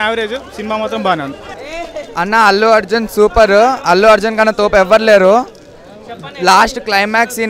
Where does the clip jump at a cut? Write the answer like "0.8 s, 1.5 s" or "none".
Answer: 1.5 s